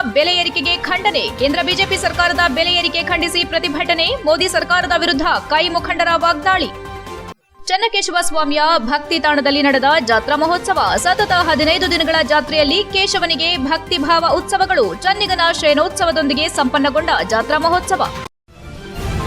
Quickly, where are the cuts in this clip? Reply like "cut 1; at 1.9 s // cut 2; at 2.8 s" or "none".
cut 1; at 18.3 s